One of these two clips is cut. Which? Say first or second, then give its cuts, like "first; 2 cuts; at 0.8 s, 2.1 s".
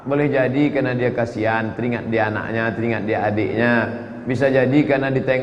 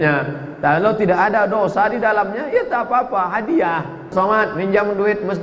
second; 1 cut; at 4.1 s